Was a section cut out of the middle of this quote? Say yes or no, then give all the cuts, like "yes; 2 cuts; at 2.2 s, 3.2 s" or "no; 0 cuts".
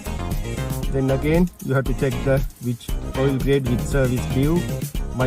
no; 0 cuts